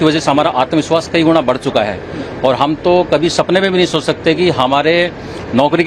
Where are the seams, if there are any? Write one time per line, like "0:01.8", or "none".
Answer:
none